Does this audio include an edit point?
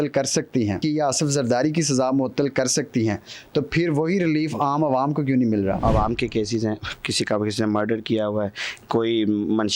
yes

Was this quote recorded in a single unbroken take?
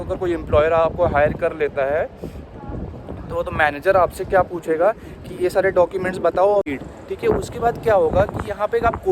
no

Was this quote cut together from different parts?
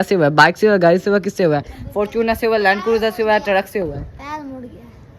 no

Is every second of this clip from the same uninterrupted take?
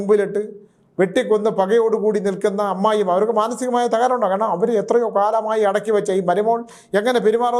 yes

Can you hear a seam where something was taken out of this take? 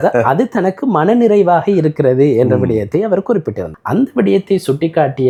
no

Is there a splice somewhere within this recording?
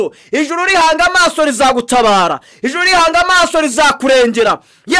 no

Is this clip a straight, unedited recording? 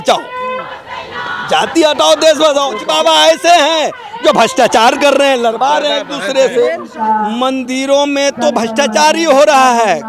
no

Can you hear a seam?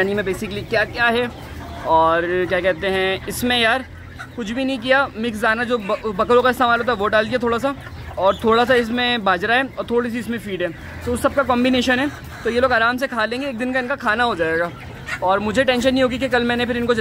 no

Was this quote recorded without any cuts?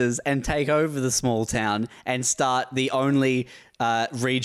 yes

